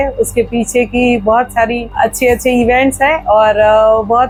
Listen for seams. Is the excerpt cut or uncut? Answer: uncut